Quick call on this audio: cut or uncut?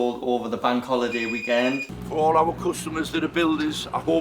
cut